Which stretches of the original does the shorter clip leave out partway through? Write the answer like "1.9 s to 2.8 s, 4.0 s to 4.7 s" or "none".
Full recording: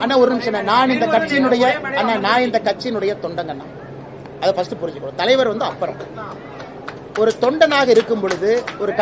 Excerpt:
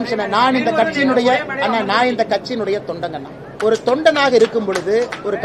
3.7 s to 7.0 s